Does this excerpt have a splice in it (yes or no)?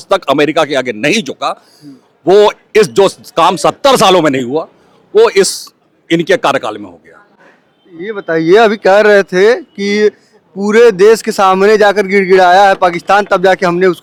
no